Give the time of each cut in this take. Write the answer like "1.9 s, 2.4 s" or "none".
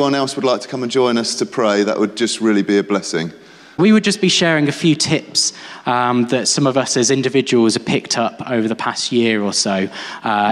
3.8 s